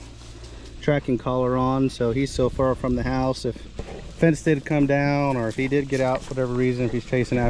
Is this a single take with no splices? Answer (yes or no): yes